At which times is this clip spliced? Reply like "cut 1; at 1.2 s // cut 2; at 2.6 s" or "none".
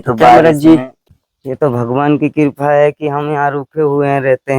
cut 1; at 0.9 s